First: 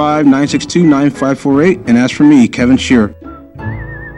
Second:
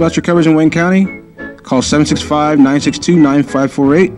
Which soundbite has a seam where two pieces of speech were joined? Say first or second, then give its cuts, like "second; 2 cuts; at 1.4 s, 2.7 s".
first; 1 cut; at 3.2 s